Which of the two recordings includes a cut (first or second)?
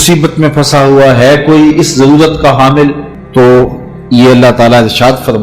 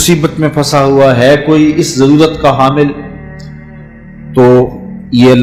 first